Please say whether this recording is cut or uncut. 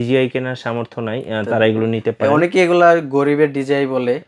uncut